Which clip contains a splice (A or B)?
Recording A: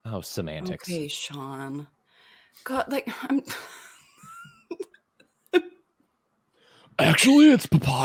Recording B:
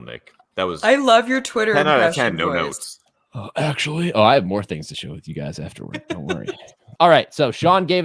B